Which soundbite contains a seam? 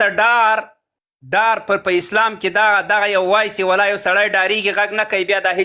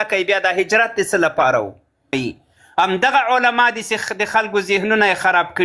second; 1 cut; at 2.1 s

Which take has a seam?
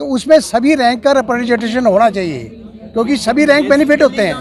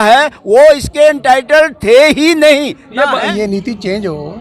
second; 1 cut; at 3.3 s

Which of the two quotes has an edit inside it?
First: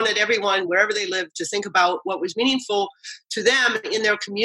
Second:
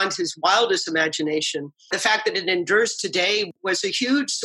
second; 2 cuts; at 1.9 s, 3.5 s

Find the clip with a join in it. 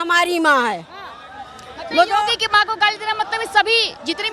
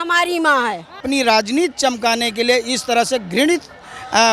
second; 1 cut; at 1.0 s

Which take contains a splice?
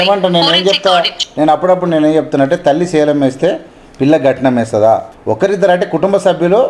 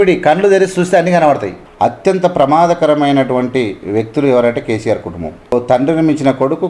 second; 2 cuts; at 1.6 s, 5.5 s

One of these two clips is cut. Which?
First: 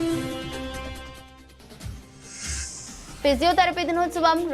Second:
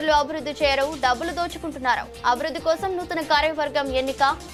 first; 1 cut; at 2.5 s

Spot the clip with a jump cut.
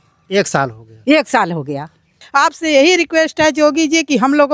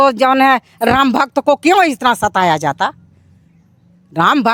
first; 1 cut; at 2.2 s

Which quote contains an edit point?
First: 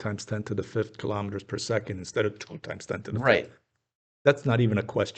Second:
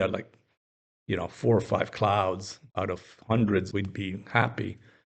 second; 1 cut; at 3.7 s

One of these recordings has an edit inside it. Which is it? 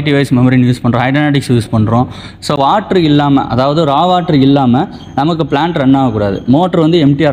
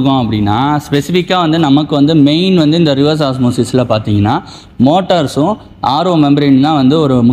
first; 1 cut; at 2.6 s

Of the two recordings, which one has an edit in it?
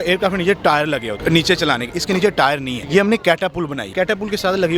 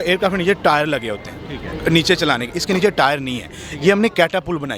first; 3 cuts; at 1.1 s, 2.7 s, 3.9 s

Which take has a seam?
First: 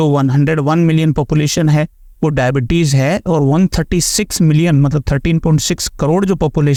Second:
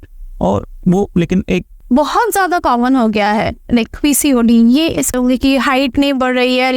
second; 2 cuts; at 1.7 s, 5.1 s

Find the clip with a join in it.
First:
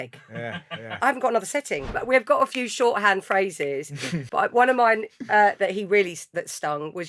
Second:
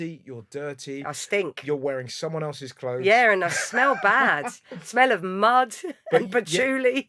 first; 3 cuts; at 1.0 s, 2.0 s, 4.2 s

